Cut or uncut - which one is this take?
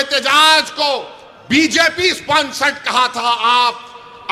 uncut